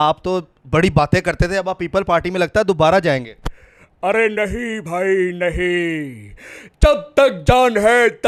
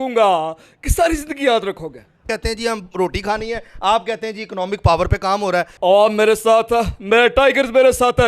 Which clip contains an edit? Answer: second; 2 cuts; at 2.3 s, 5.7 s

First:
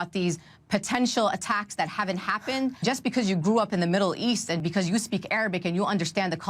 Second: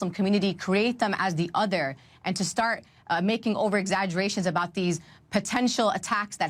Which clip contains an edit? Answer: first; 2 cuts; at 2.8 s, 4.6 s

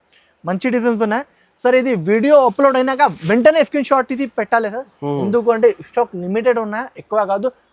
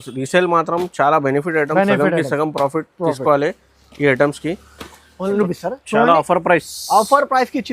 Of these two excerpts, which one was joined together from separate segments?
second; 1 cut; at 5.4 s

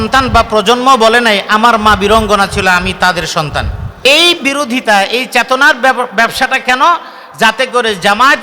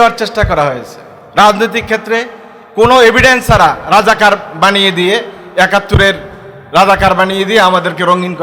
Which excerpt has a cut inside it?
first; 1 cut; at 4.0 s

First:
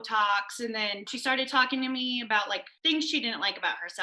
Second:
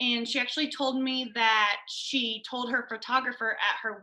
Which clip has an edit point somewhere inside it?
first; 2 cuts; at 1.1 s, 2.7 s

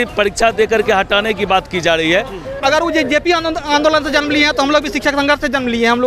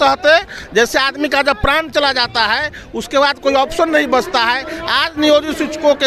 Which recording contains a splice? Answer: first; 1 cut; at 2.5 s

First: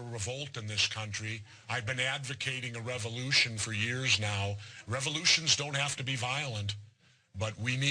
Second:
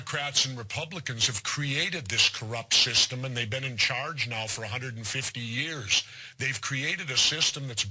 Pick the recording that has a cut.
first; 1 cut; at 2.0 s

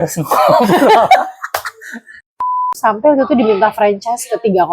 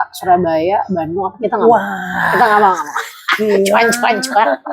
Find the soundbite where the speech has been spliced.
first; 1 cut; at 2.5 s

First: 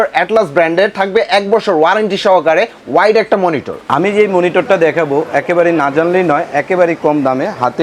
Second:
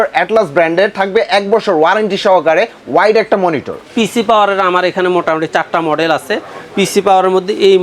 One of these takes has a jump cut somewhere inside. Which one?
second; 1 cut; at 3.7 s

